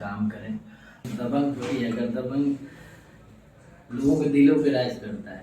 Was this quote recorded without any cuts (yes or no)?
no